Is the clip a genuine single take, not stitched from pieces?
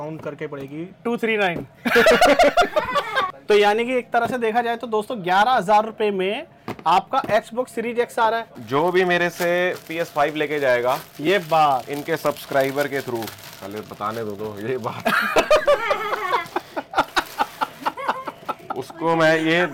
no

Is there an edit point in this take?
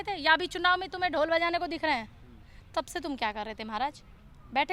no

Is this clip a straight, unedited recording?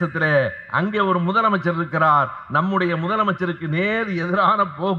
yes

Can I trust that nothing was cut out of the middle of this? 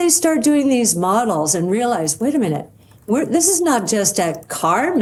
yes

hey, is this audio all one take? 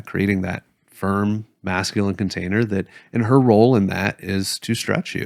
yes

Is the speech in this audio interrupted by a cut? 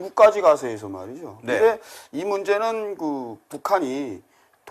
no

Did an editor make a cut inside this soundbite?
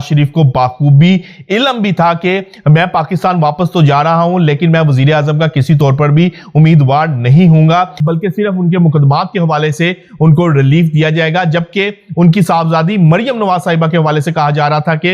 yes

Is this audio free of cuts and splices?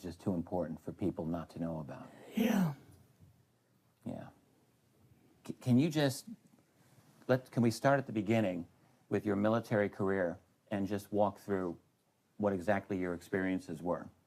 yes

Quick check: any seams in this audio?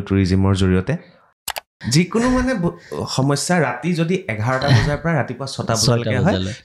yes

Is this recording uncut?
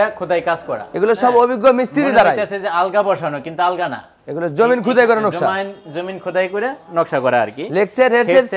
yes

